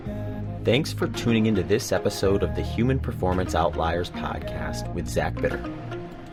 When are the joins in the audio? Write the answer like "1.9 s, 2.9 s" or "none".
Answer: none